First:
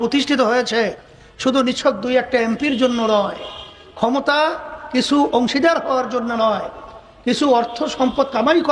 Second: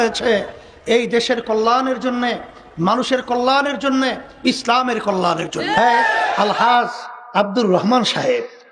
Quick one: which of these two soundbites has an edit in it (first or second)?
second